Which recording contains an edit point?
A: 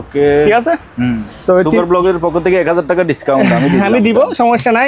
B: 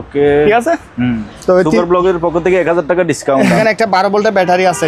B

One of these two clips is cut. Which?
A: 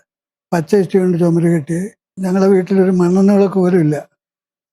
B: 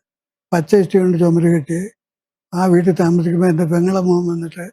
A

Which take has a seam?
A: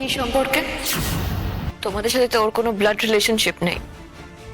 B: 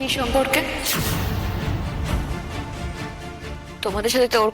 A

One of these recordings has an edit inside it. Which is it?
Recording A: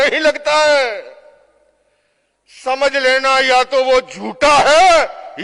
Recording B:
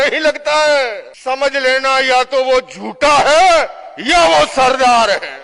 B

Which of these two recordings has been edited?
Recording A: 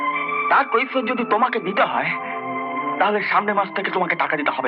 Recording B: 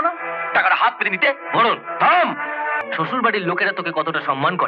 B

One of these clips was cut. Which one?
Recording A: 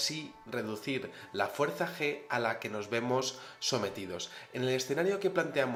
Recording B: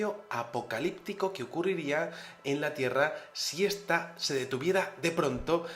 B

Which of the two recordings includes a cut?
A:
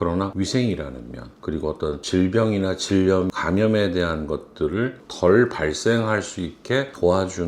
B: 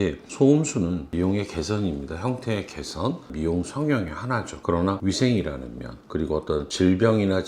B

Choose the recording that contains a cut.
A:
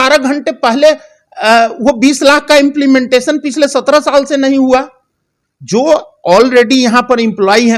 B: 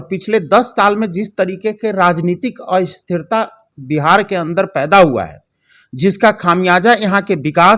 A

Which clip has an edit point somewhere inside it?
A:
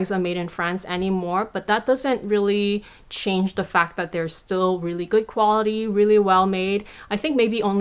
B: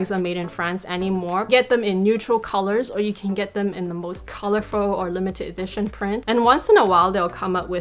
B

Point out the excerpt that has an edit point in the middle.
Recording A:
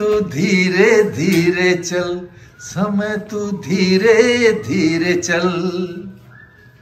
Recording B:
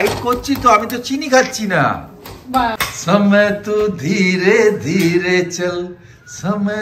B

